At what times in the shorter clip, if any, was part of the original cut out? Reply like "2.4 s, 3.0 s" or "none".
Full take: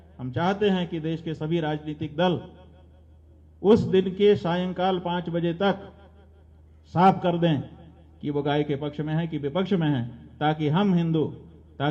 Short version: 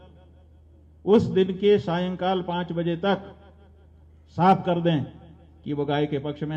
none